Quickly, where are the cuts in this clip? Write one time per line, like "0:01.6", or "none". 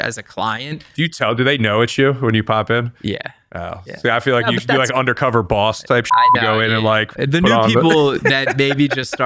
0:01.2